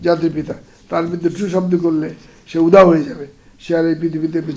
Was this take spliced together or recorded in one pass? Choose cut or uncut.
uncut